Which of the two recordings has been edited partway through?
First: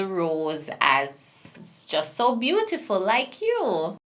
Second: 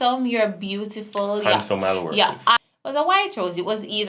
second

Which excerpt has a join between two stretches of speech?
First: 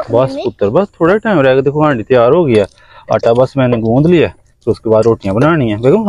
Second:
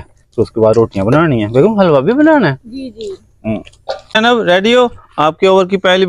second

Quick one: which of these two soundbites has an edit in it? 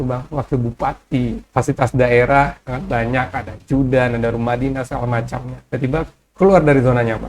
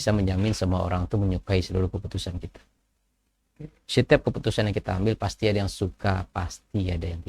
first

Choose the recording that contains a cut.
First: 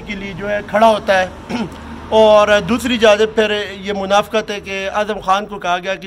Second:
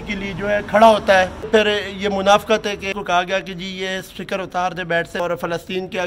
second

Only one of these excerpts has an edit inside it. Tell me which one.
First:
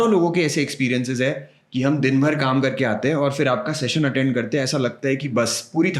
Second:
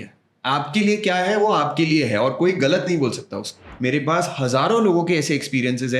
second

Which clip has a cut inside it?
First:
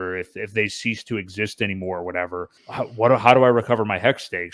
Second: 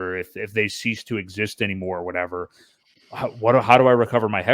first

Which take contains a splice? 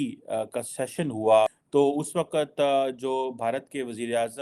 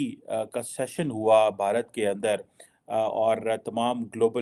first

